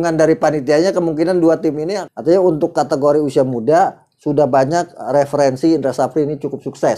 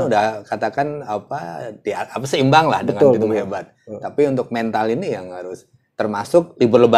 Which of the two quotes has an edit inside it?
first; 1 cut; at 2.0 s

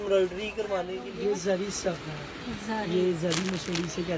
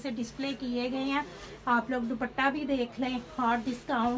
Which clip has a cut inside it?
first; 1 cut; at 1.0 s

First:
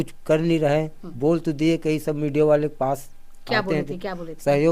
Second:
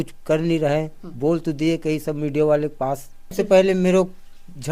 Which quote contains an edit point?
second; 1 cut; at 3.3 s

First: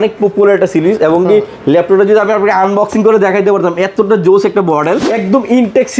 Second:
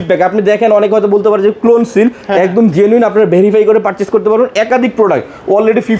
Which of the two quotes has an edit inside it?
first; 1 cut; at 5.1 s

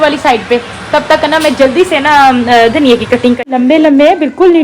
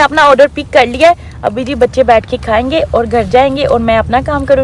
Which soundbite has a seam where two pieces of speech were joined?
first; 1 cut; at 3.5 s

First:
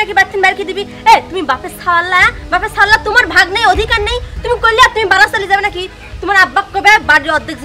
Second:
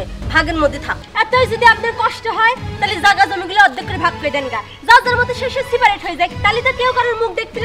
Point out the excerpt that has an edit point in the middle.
second; 1 cut; at 1.0 s

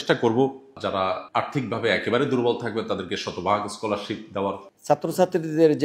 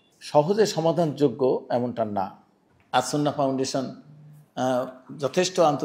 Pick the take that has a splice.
first; 2 cuts; at 0.9 s, 4.7 s

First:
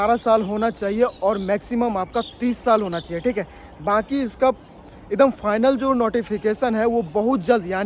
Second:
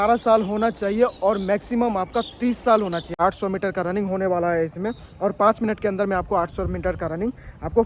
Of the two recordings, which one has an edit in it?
second; 1 cut; at 3.2 s

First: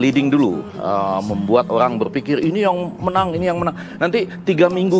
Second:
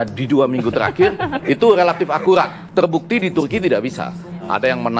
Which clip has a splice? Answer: second; 1 cut; at 2.6 s

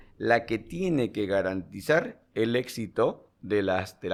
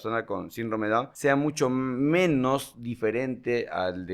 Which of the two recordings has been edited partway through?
second; 1 cut; at 1.1 s

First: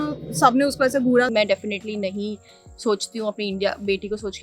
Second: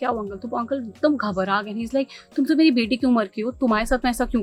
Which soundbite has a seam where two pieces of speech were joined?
first; 1 cut; at 1.3 s

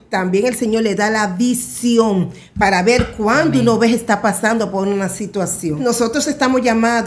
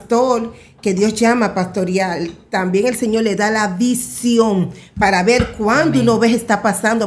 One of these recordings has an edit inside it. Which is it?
first; 1 cut; at 5.8 s

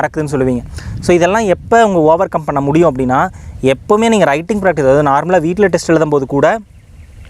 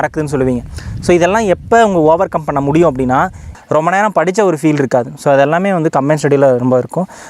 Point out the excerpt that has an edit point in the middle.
second; 1 cut; at 3.5 s

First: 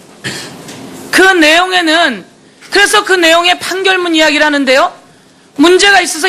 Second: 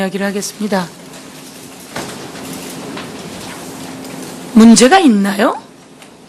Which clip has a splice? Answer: first; 1 cut; at 2.0 s

